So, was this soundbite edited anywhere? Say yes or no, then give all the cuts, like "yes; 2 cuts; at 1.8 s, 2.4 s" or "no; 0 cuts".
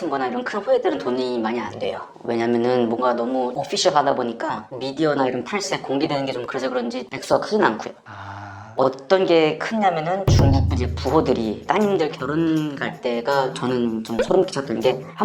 no; 0 cuts